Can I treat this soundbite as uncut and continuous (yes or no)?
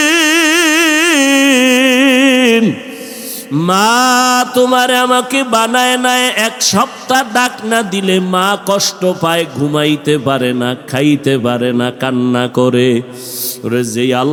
yes